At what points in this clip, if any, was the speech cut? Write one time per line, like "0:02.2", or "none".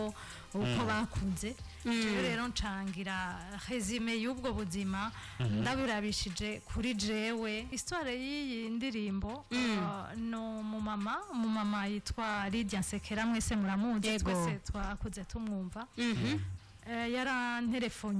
0:07.8